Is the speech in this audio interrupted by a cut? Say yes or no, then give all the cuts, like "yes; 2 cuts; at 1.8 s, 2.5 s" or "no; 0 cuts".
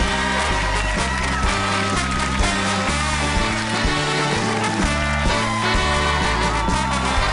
yes; 1 cut; at 4.0 s